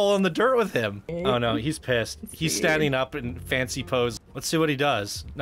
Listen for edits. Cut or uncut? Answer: cut